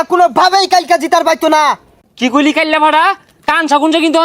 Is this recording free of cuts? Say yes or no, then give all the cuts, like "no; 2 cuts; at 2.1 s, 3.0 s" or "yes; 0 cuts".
no; 1 cut; at 1.9 s